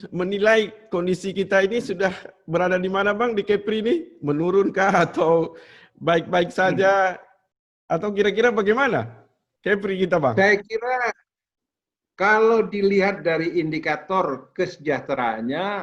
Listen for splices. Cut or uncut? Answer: uncut